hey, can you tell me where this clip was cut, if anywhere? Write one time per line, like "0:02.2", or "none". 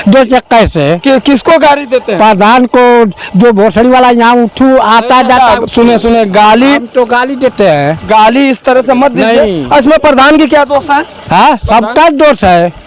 none

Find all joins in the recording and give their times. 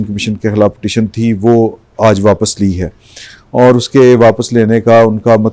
none

